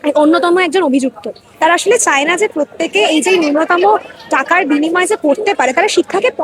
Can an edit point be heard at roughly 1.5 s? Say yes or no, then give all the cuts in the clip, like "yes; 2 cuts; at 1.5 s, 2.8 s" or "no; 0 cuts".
yes; 1 cut; at 1.5 s